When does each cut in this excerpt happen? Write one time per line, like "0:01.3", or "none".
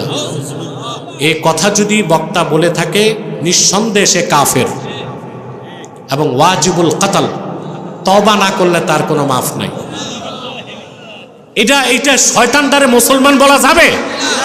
0:09.8